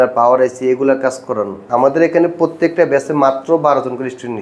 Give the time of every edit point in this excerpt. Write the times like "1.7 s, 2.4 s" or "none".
1.6 s

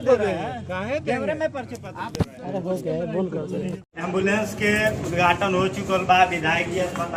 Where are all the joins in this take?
none

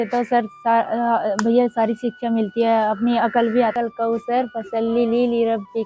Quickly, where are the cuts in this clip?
3.7 s

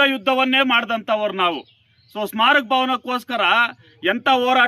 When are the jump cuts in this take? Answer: none

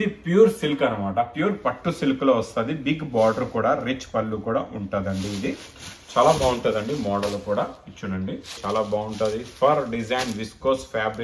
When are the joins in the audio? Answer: 8.6 s

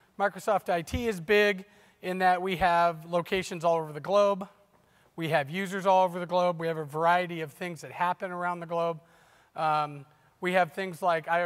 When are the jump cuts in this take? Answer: none

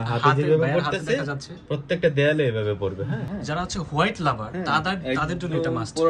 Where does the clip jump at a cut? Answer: 3.3 s

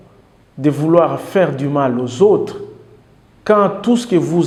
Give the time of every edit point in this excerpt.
none

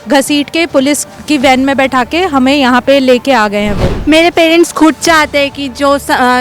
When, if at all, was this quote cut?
3.9 s

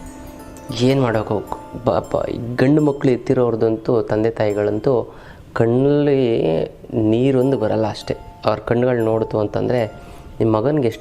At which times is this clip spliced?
none

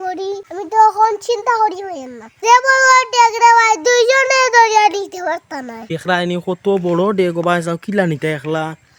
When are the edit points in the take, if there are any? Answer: none

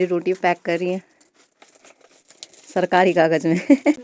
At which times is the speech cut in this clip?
none

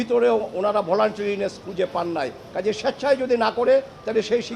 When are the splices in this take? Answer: 2.4 s

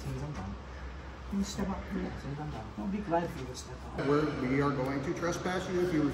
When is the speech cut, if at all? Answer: 4.0 s

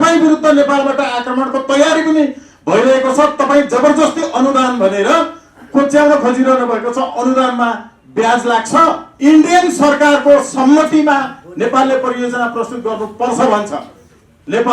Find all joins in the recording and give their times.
9.1 s

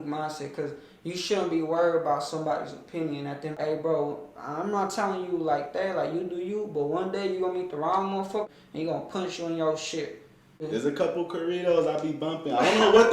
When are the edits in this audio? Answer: 3.6 s, 8.5 s, 10.6 s

